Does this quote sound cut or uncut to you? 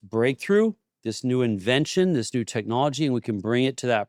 uncut